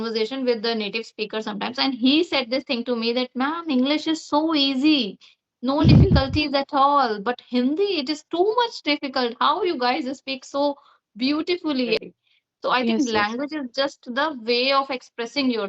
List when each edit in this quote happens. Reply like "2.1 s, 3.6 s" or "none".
12.0 s

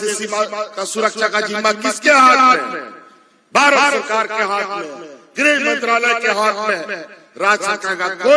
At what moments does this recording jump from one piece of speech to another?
none

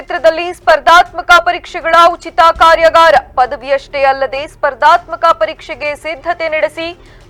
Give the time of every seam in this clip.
none

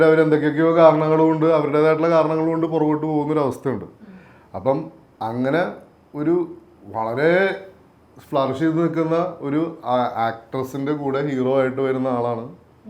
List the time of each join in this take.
none

